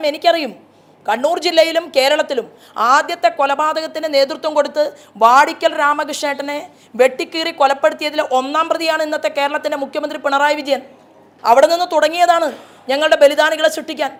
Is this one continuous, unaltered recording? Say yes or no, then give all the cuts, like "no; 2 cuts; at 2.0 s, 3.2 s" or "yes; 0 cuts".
yes; 0 cuts